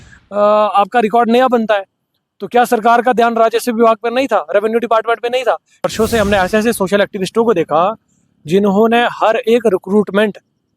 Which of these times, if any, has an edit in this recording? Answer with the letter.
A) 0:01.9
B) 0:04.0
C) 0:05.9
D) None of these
C